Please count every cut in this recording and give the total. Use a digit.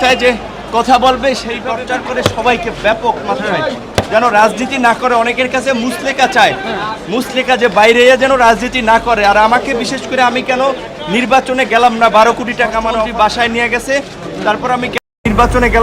2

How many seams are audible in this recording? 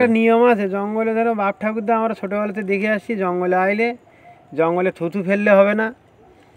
0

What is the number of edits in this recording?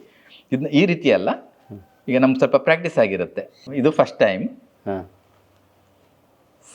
1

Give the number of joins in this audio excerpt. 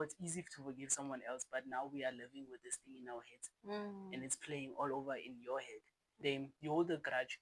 1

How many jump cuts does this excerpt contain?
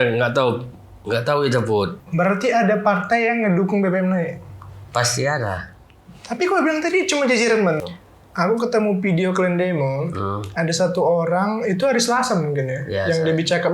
2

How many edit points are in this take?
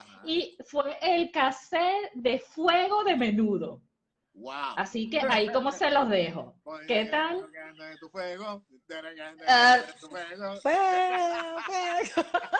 0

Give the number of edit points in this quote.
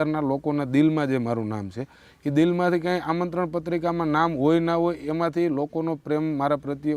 0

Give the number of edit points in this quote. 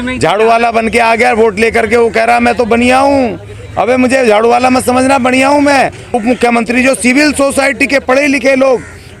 1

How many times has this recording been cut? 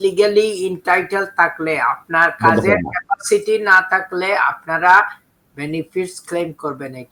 0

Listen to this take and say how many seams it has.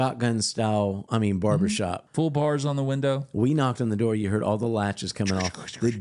3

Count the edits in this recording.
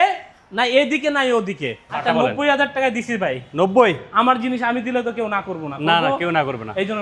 1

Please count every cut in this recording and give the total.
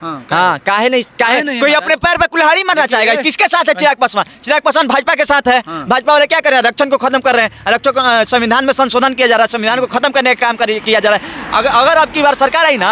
0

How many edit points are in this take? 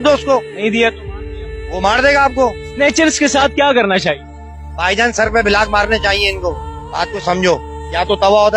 1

